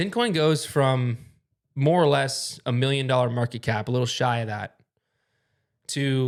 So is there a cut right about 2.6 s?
no; 0 cuts

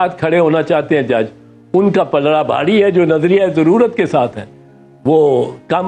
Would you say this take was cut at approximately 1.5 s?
no; 0 cuts

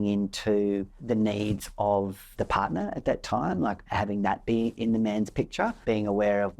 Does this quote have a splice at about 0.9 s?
yes; 5 cuts; at 0.9 s, 2.2 s, 3.8 s, 4.8 s, 5.8 s

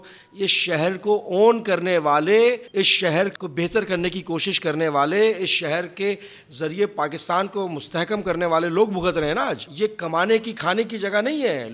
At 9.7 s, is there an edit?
yes; 2 cuts; at 3.1 s, 9.7 s

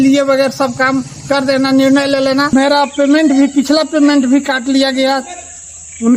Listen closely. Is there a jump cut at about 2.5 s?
yes; 1 cut; at 2.5 s

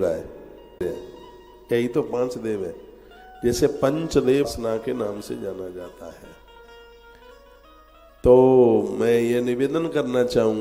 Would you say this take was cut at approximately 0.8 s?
yes; 2 cuts; at 0.8 s, 4.5 s

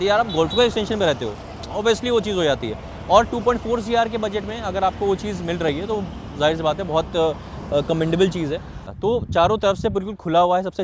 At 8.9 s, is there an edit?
yes; 1 cut; at 8.9 s

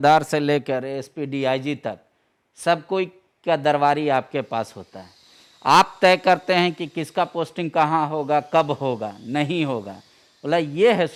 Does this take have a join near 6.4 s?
no; 0 cuts

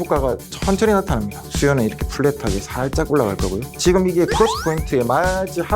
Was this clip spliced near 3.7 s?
yes; 2 cuts; at 1.4 s, 3.7 s

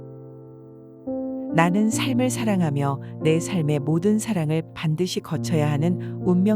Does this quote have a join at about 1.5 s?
yes; 1 cut; at 1.5 s

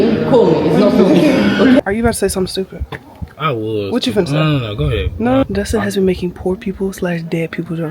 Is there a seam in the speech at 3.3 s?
no; 2 cuts; at 1.8 s, 5.4 s

